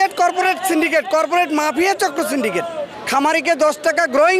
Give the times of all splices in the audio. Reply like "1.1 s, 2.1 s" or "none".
2.9 s